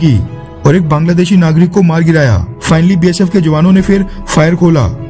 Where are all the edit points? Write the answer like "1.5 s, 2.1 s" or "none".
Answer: 2.5 s